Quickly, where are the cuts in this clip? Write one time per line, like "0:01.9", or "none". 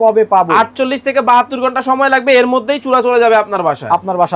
none